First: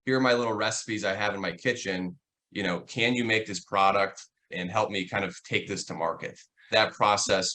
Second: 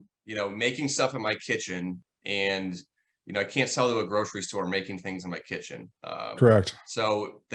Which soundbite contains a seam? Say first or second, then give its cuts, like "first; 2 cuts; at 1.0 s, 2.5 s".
first; 2 cuts; at 4.5 s, 6.6 s